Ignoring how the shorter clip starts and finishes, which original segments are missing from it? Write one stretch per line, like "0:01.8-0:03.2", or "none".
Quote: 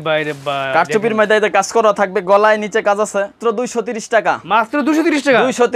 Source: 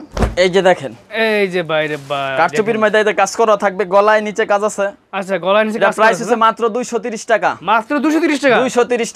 0:05.0-0:06.6